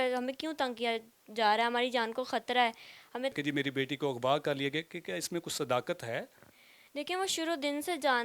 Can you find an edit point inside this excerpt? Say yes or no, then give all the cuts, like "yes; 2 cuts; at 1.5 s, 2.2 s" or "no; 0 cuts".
yes; 1 cut; at 3.3 s